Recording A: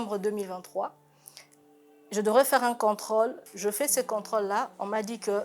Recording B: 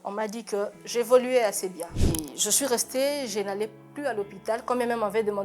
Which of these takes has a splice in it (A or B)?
B